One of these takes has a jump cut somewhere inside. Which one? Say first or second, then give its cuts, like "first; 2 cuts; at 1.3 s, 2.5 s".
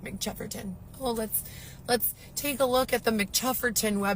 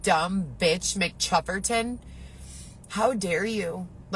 second; 1 cut; at 2.2 s